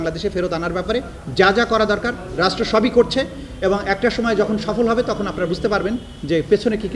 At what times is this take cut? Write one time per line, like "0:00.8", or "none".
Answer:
none